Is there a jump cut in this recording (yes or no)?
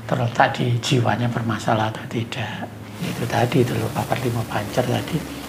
yes